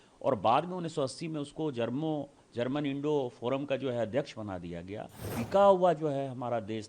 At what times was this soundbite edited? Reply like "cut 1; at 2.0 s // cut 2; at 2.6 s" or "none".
cut 1; at 5.2 s